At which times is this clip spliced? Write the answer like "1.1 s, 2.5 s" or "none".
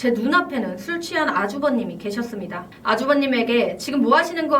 2.6 s